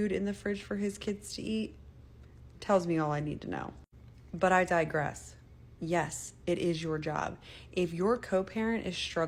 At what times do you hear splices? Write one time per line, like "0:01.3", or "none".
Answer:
none